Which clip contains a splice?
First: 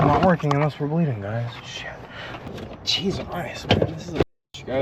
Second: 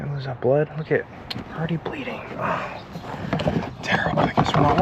first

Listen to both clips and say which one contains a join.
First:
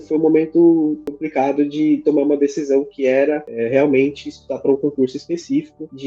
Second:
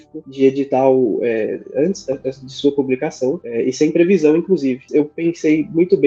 second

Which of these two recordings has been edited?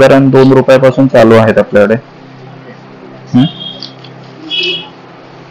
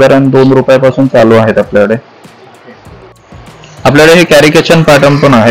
second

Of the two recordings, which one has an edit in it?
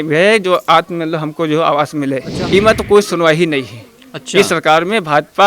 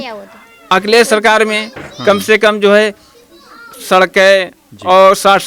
first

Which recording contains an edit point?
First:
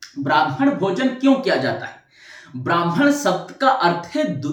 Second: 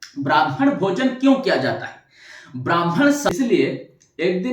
second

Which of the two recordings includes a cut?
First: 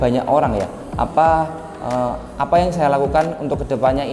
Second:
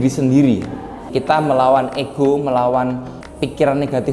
second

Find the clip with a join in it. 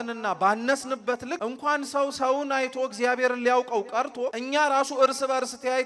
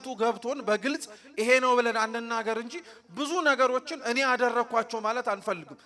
first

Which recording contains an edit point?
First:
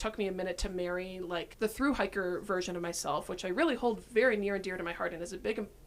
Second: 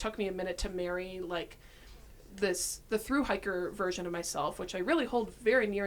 first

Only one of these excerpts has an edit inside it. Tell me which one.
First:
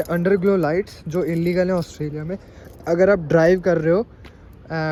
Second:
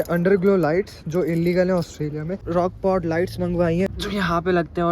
second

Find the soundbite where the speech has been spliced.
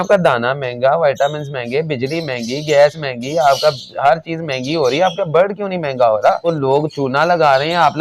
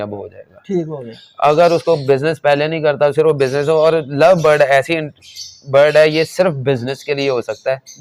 first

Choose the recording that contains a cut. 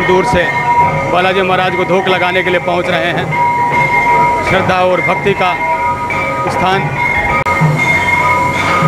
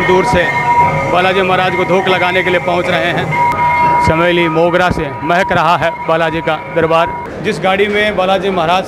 second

